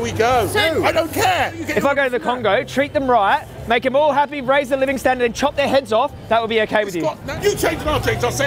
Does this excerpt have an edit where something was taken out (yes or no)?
yes